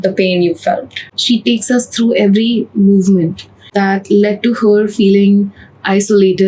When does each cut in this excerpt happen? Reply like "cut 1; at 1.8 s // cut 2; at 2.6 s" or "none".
cut 1; at 1.0 s // cut 2; at 3.6 s